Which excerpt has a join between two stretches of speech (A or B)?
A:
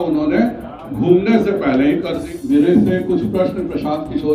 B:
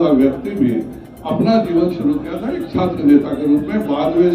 A